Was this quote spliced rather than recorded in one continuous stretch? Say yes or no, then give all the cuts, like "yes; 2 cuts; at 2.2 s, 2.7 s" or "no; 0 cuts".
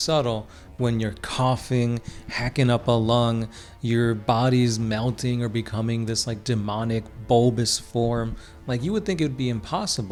no; 0 cuts